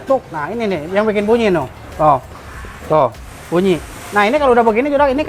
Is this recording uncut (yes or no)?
yes